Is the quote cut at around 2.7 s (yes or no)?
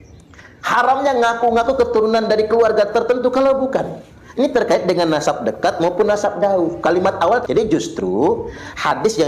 no